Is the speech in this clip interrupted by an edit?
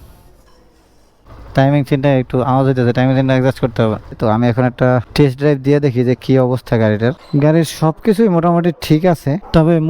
yes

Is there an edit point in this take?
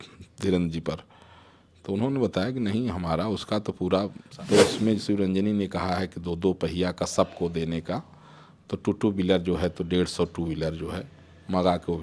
yes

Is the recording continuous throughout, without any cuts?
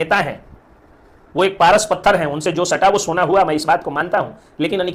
yes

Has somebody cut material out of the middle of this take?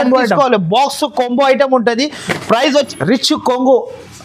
yes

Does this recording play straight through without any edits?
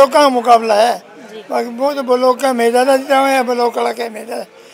yes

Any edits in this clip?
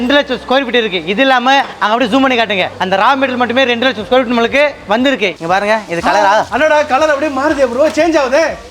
yes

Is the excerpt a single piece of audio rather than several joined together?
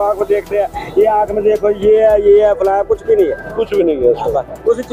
yes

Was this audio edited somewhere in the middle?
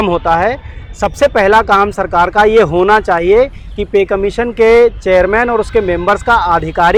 no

